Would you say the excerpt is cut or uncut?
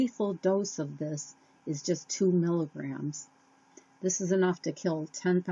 uncut